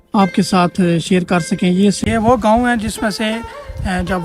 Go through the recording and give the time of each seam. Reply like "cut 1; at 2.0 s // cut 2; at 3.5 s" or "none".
cut 1; at 2.0 s